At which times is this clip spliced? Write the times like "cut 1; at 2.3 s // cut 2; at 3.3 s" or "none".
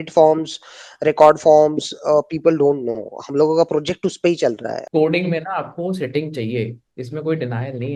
cut 1; at 4.8 s